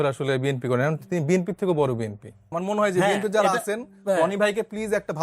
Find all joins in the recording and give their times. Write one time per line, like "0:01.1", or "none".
0:02.5